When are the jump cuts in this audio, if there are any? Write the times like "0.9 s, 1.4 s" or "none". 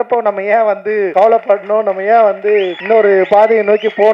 1.1 s, 2.8 s